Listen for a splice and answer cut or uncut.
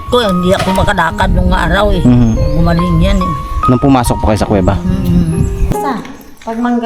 cut